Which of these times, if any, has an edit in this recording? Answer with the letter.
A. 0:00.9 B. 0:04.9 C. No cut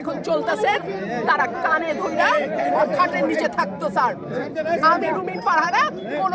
C